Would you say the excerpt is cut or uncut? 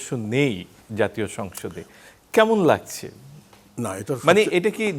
uncut